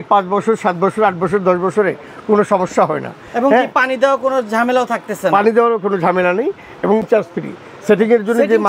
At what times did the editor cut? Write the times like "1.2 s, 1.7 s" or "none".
7.0 s